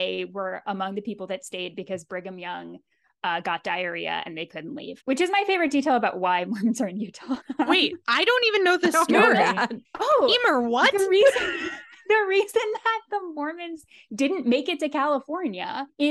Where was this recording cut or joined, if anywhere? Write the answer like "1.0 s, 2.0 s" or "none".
none

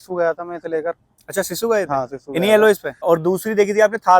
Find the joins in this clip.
2.9 s

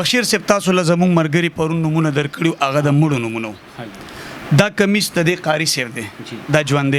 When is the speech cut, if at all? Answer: none

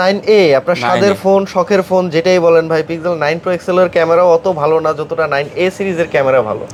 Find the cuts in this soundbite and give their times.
none

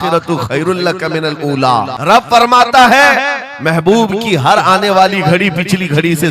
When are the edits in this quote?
1.9 s

